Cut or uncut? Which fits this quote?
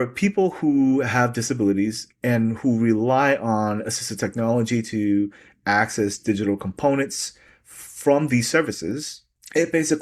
uncut